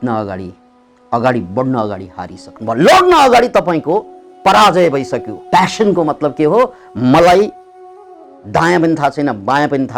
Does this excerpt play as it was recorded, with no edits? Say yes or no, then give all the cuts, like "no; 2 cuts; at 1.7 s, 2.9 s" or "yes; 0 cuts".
no; 1 cut; at 5.3 s